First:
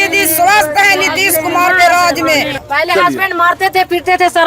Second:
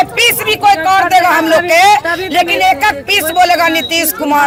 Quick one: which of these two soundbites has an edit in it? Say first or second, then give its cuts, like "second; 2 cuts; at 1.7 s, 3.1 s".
first; 1 cut; at 2.6 s